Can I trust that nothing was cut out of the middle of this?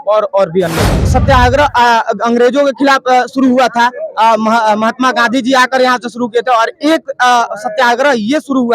no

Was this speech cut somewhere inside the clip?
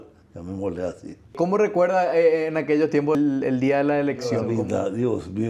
yes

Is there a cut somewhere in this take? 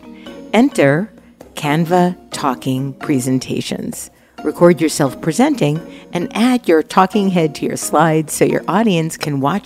no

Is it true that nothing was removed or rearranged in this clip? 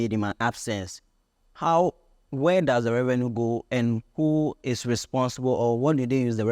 yes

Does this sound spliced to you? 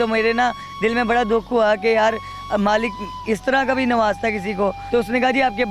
yes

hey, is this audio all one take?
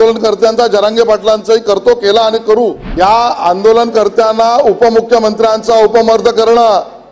no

